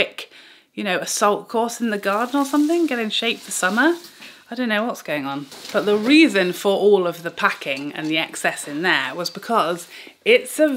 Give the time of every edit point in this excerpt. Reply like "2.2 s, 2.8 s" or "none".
none